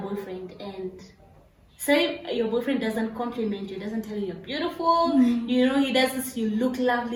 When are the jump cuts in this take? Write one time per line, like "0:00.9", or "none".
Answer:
none